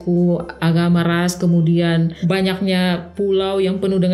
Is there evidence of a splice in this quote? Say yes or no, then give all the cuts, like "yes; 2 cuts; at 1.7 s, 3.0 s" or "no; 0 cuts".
yes; 1 cut; at 2.2 s